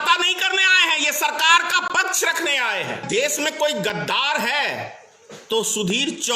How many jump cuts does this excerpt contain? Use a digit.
1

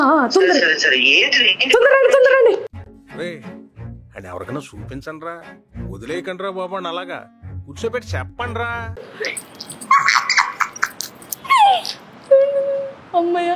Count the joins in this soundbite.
0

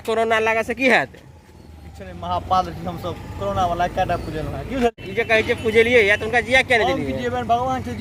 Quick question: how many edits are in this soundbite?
0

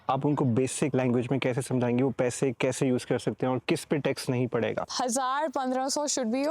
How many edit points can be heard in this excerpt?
2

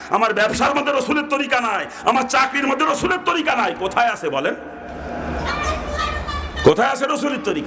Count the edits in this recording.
0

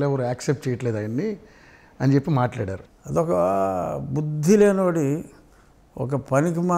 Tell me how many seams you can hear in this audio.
1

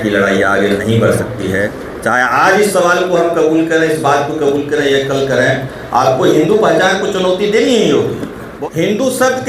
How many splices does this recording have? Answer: 1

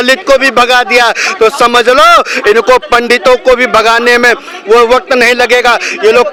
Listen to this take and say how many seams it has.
0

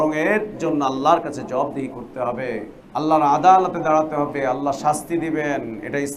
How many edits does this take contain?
1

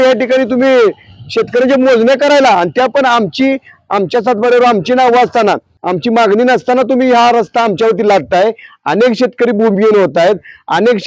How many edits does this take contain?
1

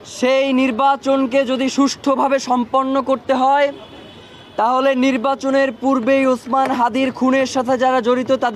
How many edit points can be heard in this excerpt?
0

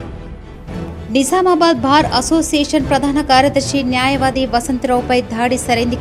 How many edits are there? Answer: 1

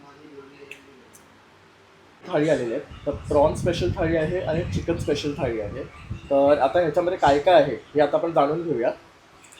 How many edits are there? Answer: 1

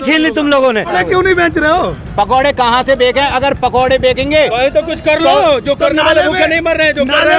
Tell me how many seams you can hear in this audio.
1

